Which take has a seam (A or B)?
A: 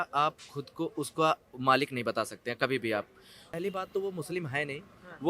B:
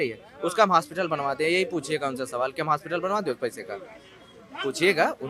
A